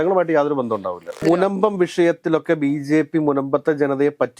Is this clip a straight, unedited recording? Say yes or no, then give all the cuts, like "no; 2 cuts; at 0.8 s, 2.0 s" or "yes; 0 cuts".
no; 1 cut; at 1.2 s